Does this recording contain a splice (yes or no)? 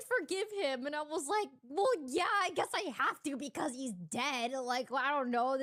no